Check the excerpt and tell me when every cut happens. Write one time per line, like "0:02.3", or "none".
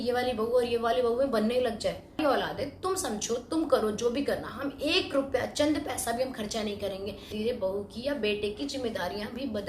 0:02.2
0:07.3